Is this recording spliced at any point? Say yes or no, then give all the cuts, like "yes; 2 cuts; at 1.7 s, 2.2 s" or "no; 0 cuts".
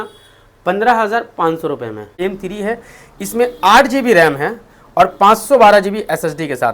yes; 1 cut; at 2.1 s